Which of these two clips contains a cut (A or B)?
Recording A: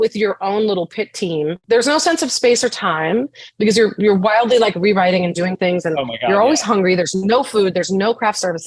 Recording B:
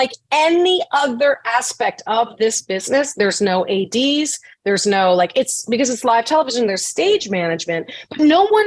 A